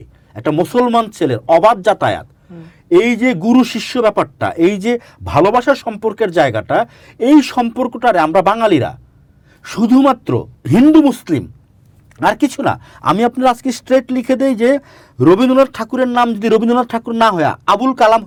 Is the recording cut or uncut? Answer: uncut